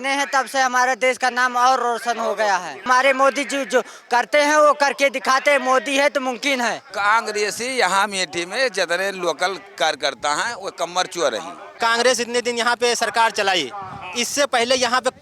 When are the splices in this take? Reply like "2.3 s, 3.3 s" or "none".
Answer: 2.8 s, 6.9 s, 11.7 s